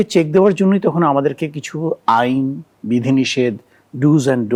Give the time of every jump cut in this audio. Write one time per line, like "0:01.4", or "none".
none